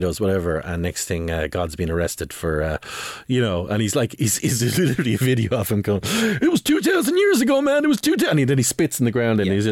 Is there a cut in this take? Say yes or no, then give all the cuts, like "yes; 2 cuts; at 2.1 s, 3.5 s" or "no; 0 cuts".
no; 0 cuts